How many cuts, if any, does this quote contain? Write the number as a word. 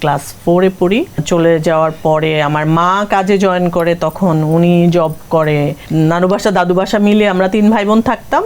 two